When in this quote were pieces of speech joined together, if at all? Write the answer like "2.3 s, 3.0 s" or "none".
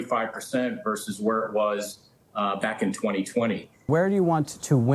3.9 s